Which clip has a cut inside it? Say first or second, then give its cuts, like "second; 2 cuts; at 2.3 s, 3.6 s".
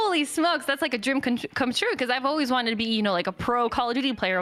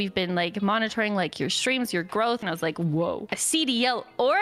second; 2 cuts; at 2.4 s, 3.3 s